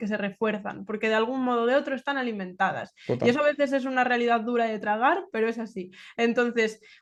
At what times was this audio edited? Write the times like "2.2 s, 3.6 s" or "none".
none